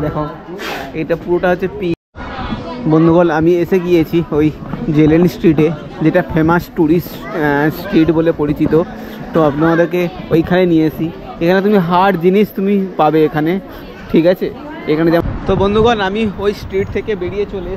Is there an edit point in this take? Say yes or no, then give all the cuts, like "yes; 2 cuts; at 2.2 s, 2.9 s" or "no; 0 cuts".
yes; 2 cuts; at 1.9 s, 15.2 s